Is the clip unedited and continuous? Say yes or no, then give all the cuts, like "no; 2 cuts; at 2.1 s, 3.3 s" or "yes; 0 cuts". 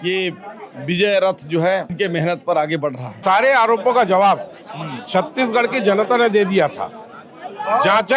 no; 2 cuts; at 1.9 s, 3.2 s